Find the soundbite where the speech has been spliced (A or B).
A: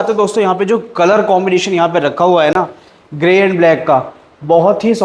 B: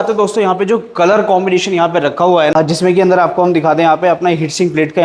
B